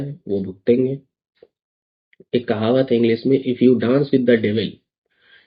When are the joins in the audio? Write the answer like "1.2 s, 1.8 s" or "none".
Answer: none